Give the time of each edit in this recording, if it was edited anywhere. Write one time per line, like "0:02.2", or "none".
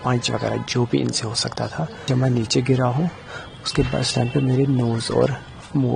0:02.1